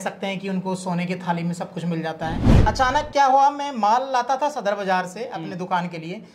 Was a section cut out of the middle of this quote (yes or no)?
yes